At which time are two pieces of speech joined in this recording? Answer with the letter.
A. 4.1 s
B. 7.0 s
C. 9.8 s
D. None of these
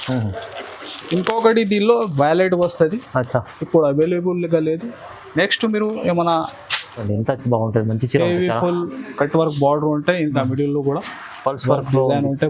B